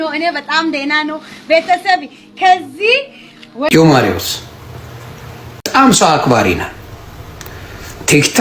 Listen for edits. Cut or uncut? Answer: cut